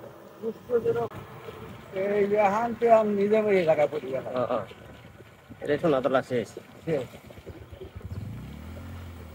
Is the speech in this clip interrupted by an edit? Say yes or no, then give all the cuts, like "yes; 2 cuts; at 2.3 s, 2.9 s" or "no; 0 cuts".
yes; 1 cut; at 1.1 s